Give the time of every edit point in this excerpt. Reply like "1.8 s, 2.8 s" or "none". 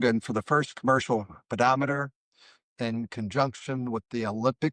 none